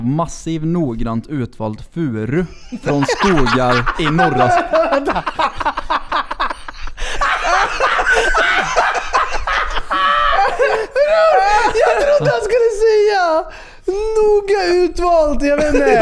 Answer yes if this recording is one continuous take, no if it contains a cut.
yes